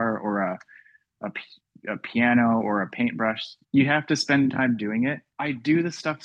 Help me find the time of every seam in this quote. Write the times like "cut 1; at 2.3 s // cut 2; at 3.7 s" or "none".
cut 1; at 3.5 s // cut 2; at 5.3 s